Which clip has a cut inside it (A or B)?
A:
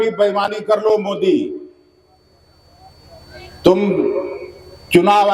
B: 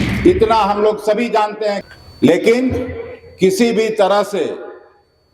B